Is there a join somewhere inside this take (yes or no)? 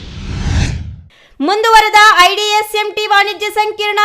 no